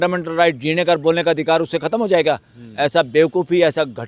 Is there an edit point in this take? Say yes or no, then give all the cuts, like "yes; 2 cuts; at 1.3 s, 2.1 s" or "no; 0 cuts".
no; 0 cuts